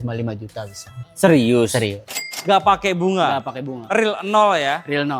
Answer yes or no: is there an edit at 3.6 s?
no